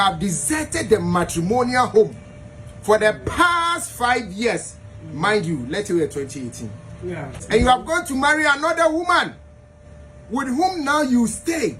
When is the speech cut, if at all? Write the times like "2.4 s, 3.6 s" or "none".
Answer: 7.4 s